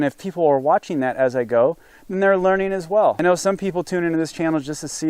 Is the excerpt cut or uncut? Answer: cut